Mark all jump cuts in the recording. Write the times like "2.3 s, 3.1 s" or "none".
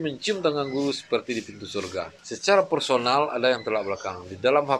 2.2 s